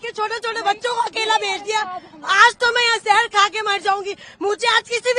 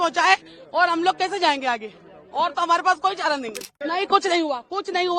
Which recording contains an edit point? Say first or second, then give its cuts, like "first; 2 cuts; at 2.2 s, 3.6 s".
second; 1 cut; at 3.6 s